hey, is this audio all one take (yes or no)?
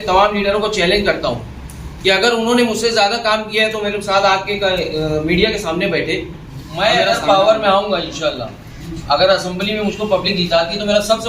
no